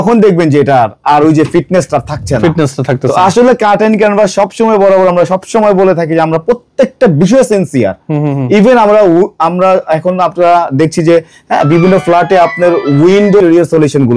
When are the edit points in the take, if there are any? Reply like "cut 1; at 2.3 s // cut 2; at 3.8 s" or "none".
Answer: none